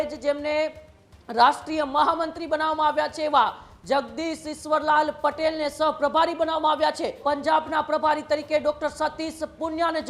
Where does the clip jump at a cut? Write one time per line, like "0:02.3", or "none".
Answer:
0:07.2